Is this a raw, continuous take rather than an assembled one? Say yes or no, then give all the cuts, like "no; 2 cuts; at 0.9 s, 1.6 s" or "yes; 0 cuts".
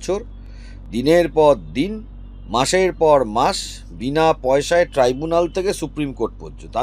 yes; 0 cuts